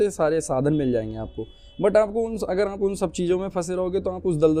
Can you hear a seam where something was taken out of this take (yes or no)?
no